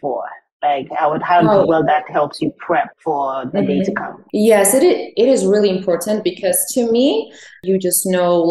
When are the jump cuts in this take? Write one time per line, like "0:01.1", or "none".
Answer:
0:02.9
0:04.1
0:07.6